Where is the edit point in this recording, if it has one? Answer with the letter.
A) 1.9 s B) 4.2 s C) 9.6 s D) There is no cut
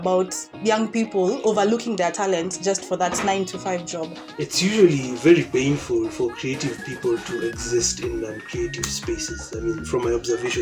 B